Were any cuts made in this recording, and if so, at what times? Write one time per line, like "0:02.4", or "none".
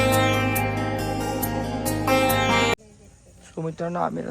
0:02.8